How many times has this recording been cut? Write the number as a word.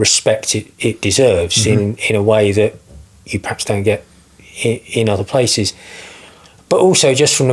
zero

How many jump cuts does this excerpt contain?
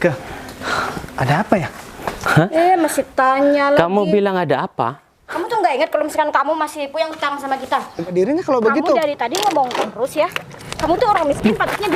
one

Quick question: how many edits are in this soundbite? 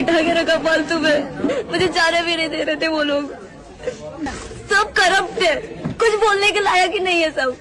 one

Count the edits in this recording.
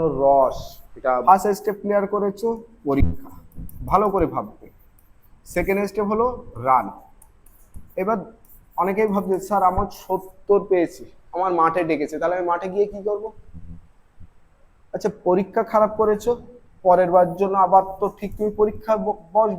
one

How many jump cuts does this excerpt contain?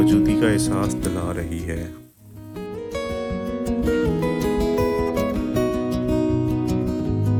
zero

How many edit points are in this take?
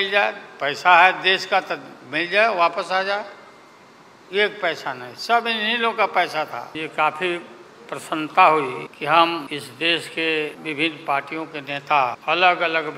five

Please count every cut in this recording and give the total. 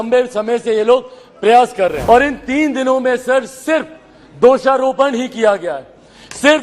one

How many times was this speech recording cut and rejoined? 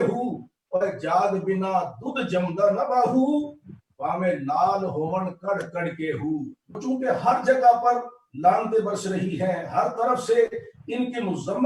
one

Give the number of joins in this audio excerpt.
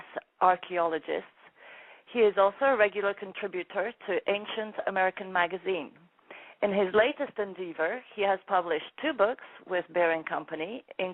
one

